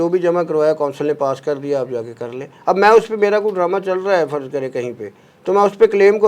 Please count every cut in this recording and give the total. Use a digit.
0